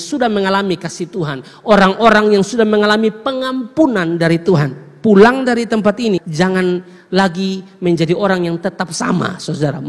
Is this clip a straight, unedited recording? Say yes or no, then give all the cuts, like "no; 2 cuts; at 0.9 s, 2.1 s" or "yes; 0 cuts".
no; 1 cut; at 6.3 s